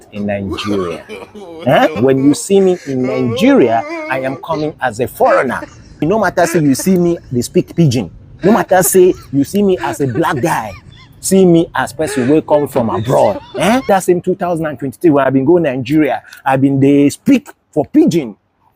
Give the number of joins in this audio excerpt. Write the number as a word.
three